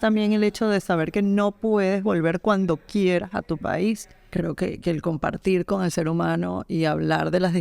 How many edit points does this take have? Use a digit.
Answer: 1